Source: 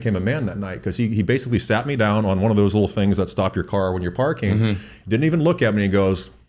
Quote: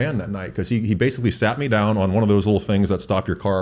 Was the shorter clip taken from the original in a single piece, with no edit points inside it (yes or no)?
yes